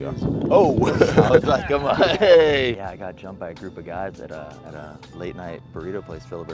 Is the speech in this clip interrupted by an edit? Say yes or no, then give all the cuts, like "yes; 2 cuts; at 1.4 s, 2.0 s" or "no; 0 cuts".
yes; 1 cut; at 2.8 s